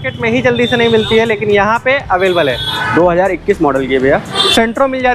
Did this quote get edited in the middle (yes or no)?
yes